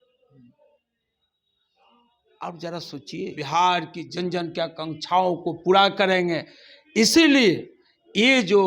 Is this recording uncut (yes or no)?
no